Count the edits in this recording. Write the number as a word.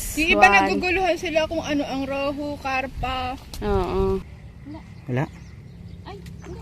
one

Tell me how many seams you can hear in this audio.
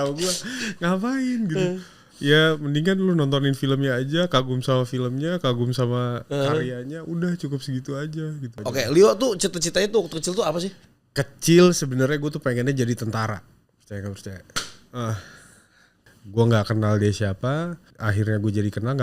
two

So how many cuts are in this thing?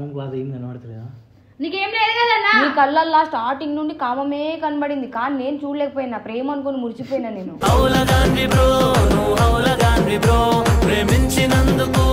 zero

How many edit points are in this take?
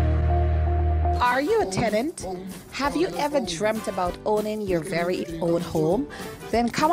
one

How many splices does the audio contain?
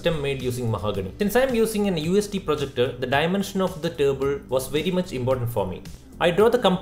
one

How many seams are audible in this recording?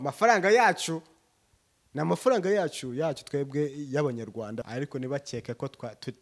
one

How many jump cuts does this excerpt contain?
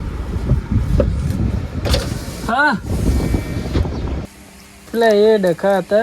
one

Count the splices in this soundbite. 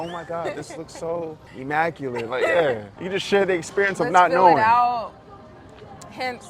two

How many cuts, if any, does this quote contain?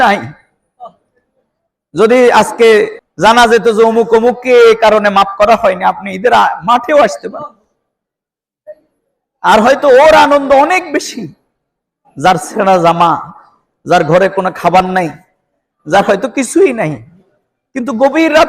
zero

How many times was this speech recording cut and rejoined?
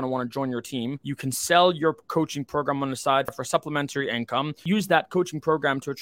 three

